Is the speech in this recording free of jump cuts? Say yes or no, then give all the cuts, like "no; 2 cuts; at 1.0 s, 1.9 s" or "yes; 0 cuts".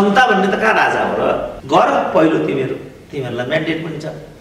no; 1 cut; at 1.5 s